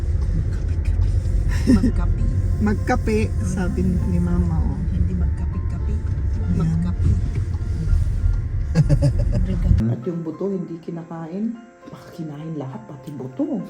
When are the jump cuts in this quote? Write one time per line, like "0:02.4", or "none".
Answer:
0:09.8